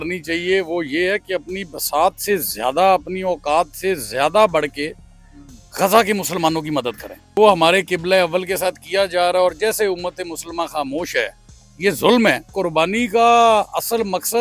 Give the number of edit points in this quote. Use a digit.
2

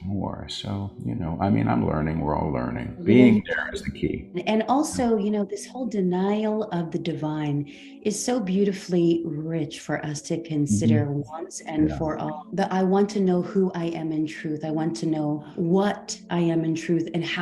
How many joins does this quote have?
4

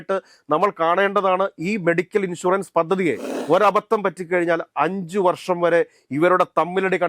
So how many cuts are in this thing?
1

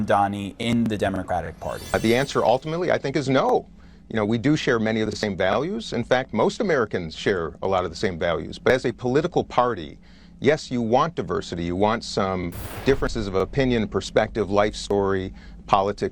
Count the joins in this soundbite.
1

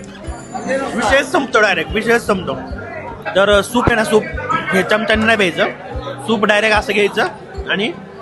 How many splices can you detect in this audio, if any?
1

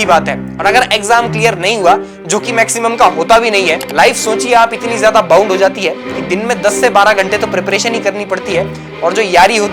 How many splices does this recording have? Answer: 1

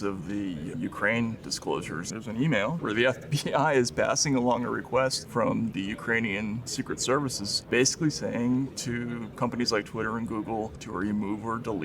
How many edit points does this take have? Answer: 7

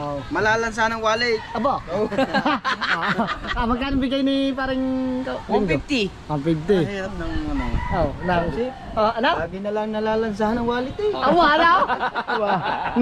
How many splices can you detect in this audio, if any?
0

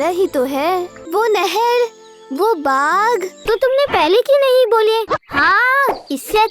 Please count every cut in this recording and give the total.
2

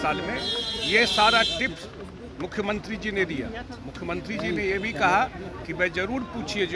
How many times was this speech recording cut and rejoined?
0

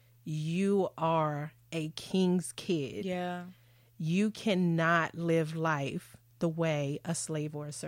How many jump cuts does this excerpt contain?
0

